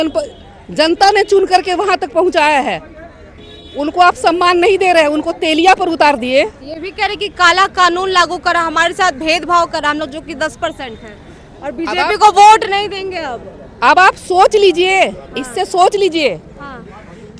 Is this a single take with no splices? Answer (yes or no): yes